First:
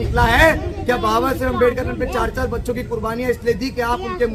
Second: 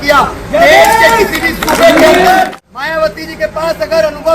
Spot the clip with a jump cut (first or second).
second